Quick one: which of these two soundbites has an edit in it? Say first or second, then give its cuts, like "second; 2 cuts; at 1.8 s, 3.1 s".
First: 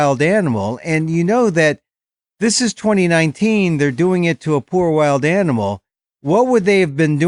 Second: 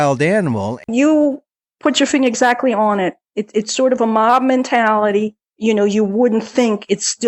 second; 2 cuts; at 0.9 s, 5.4 s